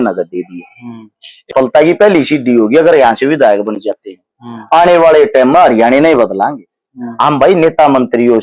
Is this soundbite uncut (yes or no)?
no